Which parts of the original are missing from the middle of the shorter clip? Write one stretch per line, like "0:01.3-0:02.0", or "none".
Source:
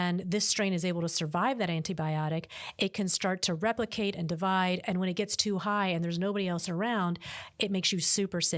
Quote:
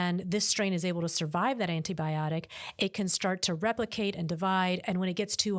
none